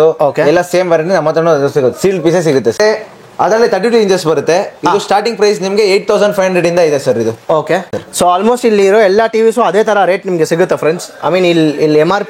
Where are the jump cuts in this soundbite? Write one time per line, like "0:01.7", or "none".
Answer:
0:02.8
0:08.0

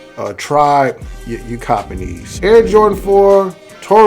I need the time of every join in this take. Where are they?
0:02.2

